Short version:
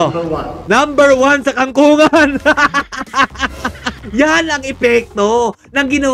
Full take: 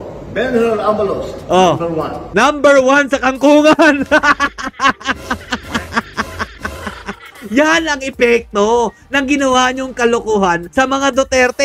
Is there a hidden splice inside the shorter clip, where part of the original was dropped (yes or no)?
yes